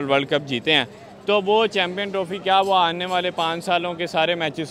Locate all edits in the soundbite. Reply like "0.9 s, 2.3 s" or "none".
none